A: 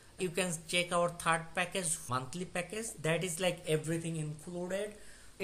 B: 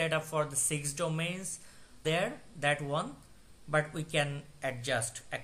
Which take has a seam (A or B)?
A